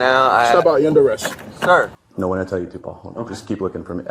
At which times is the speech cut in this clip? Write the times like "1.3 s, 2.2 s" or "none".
2.0 s